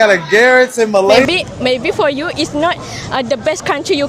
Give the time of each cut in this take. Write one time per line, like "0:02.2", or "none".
0:01.2